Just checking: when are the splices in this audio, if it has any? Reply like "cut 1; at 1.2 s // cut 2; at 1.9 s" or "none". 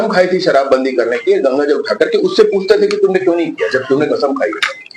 none